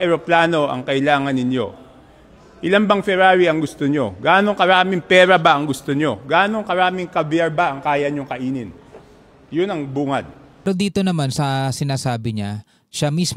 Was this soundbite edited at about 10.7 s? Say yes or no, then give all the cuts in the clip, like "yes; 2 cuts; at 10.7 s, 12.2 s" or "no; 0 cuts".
yes; 1 cut; at 10.7 s